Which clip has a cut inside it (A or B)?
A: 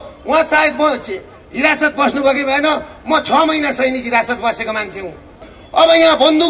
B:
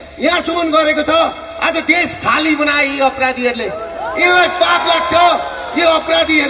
A